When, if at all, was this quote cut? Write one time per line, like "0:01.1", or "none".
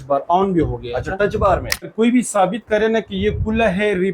0:01.9